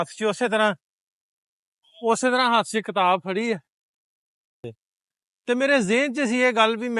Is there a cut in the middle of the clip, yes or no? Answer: yes